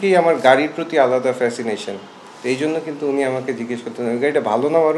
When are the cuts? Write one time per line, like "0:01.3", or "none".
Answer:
none